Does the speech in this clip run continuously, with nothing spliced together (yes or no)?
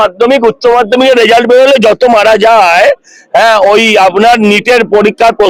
yes